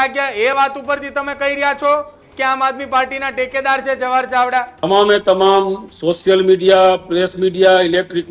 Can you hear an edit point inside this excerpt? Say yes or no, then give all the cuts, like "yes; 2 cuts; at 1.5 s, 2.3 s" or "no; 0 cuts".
no; 0 cuts